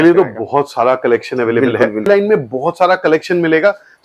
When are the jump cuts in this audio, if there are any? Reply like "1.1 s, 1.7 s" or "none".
2.1 s